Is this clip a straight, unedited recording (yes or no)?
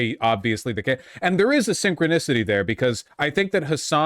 no